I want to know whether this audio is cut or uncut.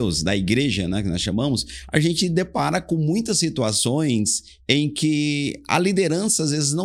uncut